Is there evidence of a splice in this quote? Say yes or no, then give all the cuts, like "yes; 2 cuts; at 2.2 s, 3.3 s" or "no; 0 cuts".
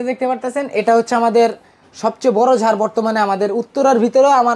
no; 0 cuts